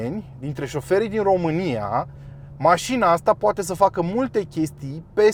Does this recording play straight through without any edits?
yes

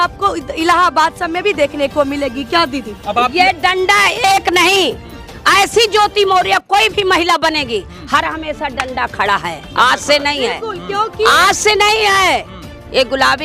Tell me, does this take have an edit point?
no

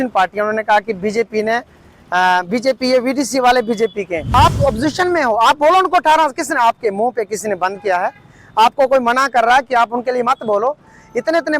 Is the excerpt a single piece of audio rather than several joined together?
no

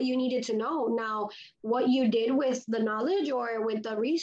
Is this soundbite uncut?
yes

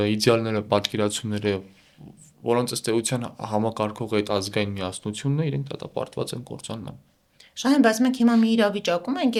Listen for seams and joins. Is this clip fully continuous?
yes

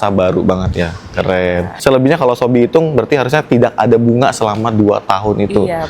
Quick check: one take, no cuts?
no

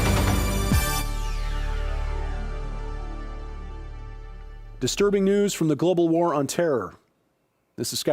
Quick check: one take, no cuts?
yes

